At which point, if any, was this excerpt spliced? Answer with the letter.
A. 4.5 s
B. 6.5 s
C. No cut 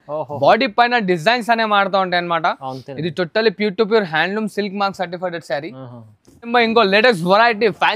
B